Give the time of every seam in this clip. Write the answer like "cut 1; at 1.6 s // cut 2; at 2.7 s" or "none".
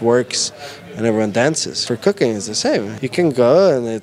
cut 1; at 1.7 s // cut 2; at 3.0 s